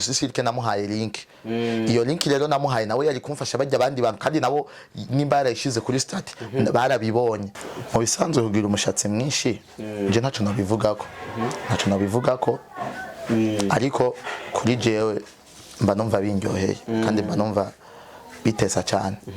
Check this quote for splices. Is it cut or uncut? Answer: cut